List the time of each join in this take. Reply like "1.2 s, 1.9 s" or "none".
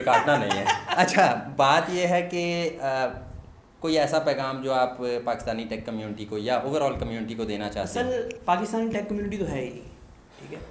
none